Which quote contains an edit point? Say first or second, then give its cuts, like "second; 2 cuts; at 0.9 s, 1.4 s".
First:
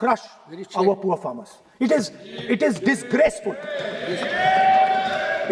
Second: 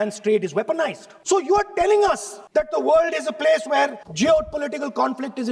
second; 3 cuts; at 1.1 s, 2.3 s, 4.0 s